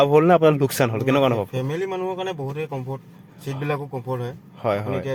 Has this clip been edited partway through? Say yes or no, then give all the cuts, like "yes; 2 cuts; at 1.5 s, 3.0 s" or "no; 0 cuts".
no; 0 cuts